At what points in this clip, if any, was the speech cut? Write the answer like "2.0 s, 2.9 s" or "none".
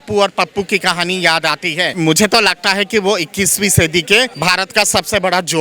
1.9 s, 4.3 s